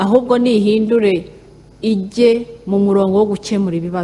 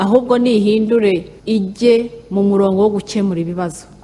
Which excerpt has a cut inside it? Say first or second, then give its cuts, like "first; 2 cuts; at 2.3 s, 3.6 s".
second; 1 cut; at 1.3 s